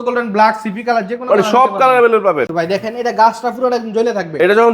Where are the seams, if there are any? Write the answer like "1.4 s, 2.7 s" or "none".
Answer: 2.5 s